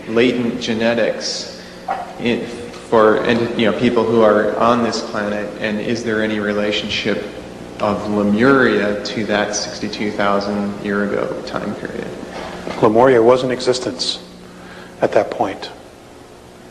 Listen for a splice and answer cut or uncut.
cut